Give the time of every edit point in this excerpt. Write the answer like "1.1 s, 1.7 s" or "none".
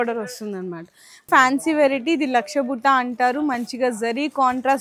1.3 s